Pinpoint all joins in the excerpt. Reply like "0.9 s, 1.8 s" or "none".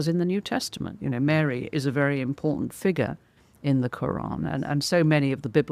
none